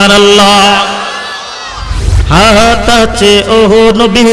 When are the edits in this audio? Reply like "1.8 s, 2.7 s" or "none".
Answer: 2.1 s

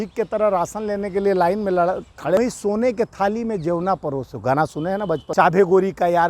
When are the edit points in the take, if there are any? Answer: 2.4 s, 5.3 s

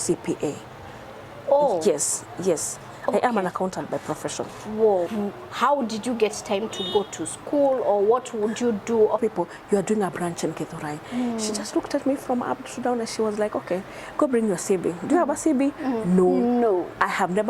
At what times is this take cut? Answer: 5.1 s, 9.2 s

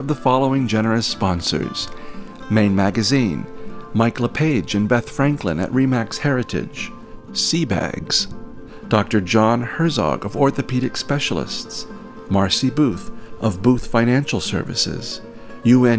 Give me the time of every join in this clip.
none

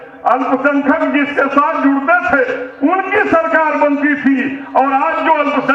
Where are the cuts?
none

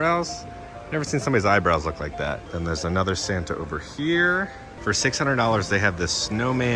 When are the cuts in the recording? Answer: none

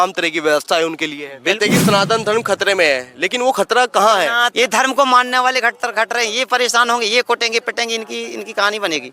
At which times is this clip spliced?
1.6 s, 4.5 s

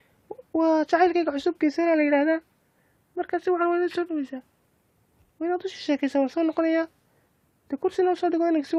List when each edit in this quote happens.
none

